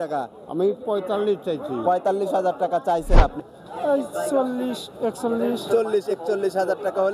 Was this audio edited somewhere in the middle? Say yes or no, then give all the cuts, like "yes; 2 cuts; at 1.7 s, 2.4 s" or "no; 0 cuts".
yes; 1 cut; at 3.4 s